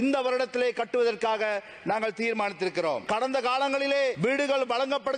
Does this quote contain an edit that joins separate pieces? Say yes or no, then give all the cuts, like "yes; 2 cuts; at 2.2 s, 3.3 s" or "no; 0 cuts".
yes; 2 cuts; at 3.0 s, 4.2 s